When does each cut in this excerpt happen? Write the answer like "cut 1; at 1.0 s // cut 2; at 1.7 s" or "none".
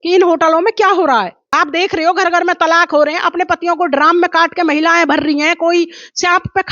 cut 1; at 1.5 s